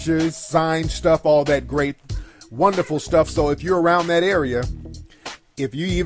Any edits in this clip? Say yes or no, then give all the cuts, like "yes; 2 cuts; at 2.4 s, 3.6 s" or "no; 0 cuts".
yes; 1 cut; at 4.1 s